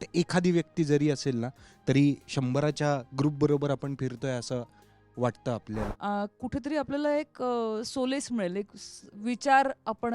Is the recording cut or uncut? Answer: cut